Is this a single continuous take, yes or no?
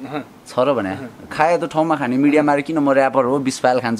yes